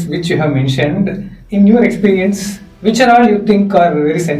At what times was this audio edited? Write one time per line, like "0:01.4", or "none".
0:01.4